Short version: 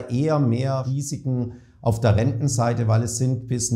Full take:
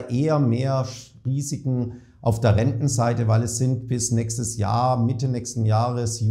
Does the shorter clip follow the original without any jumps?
no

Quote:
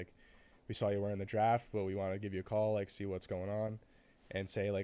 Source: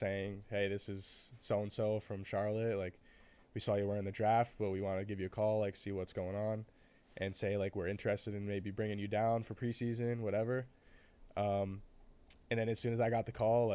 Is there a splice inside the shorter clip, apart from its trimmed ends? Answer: no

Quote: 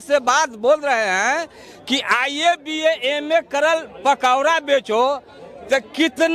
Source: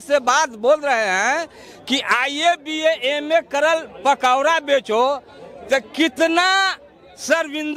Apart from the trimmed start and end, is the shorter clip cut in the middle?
no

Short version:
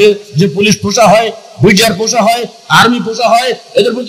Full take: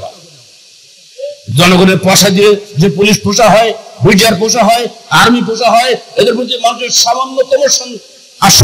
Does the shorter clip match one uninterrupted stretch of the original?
yes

